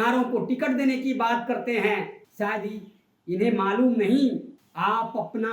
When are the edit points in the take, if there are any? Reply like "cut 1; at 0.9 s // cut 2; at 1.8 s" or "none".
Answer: cut 1; at 2.2 s // cut 2; at 4.6 s